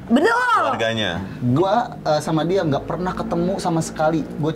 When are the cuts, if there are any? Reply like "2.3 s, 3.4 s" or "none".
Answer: 1.3 s